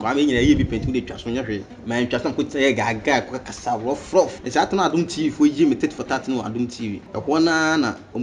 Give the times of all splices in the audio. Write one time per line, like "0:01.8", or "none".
0:01.7
0:04.4
0:07.0